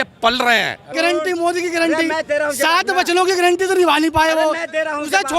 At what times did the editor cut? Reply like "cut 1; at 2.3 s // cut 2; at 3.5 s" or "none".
cut 1; at 0.9 s